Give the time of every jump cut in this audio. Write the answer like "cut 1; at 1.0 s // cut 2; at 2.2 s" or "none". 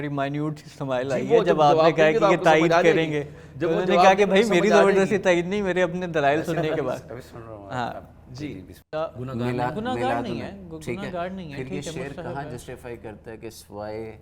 cut 1; at 8.7 s

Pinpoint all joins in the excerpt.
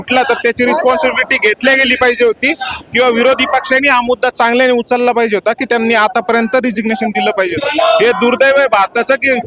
none

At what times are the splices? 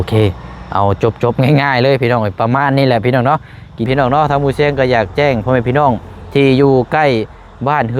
cut 1; at 3.9 s

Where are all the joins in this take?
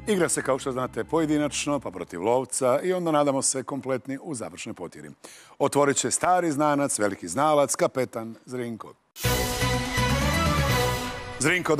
cut 1; at 7.7 s

